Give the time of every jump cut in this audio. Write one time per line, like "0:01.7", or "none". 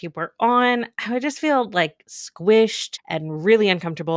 0:03.0